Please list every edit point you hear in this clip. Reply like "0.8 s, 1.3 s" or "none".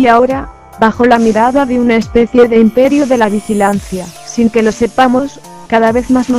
none